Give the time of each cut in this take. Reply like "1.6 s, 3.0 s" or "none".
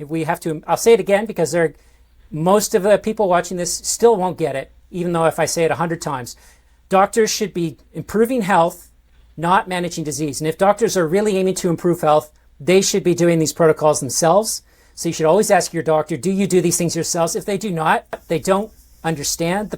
18.2 s